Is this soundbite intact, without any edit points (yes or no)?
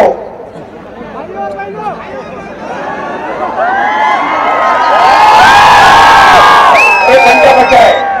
yes